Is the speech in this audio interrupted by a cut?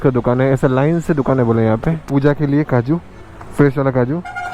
yes; 1 cut; at 2.0 s

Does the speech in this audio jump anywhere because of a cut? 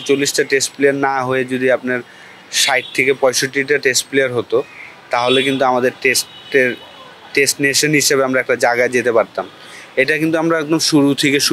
no; 0 cuts

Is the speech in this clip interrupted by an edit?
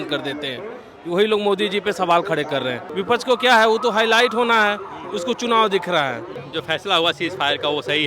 yes; 2 cuts; at 2.9 s, 6.4 s

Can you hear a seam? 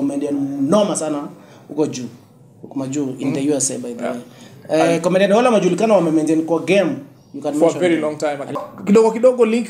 yes; 1 cut; at 8.5 s

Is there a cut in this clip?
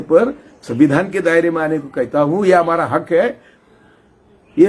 no; 0 cuts

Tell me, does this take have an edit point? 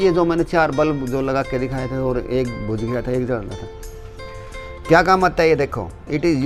no; 0 cuts

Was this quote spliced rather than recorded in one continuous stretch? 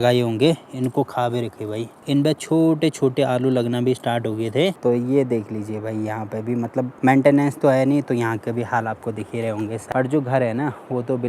yes; 4 cuts; at 2.0 s, 4.8 s, 6.9 s, 9.8 s

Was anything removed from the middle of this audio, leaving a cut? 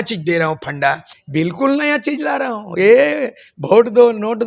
yes; 1 cut; at 1.1 s

